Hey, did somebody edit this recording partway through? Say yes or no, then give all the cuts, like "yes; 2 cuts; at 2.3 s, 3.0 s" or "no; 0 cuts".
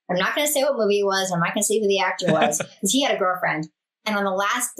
yes; 1 cut; at 3.8 s